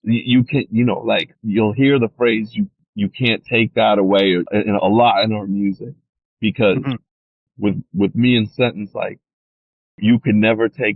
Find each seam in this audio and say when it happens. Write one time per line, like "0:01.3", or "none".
0:01.4
0:02.8
0:04.5
0:07.5
0:10.0